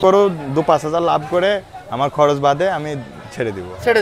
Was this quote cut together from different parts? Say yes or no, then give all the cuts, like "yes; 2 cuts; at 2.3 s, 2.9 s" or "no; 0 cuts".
no; 0 cuts